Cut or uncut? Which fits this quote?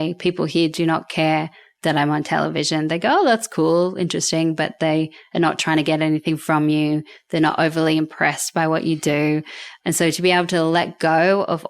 cut